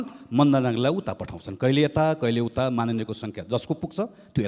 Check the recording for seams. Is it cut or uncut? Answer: uncut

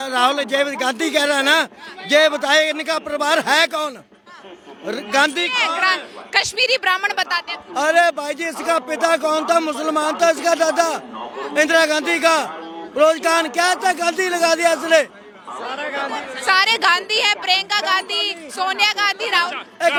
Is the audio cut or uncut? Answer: uncut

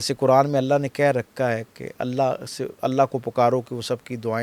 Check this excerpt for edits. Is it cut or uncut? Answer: uncut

